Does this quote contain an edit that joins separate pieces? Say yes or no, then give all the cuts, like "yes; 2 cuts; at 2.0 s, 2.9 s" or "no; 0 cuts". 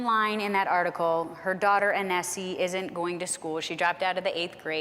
no; 0 cuts